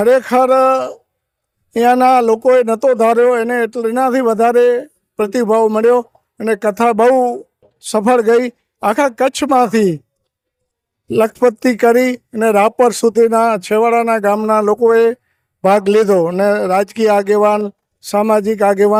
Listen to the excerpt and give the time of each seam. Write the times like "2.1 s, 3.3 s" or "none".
none